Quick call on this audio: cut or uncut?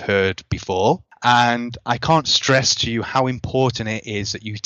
cut